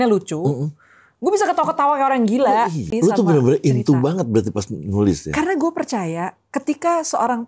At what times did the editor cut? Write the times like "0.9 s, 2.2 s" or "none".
2.9 s